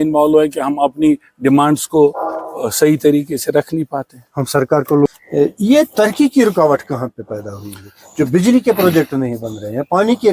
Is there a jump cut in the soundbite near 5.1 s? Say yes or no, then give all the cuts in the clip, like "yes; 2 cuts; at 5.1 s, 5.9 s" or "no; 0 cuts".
yes; 1 cut; at 5.1 s